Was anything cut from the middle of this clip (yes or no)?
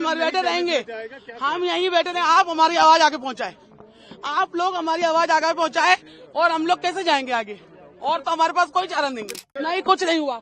yes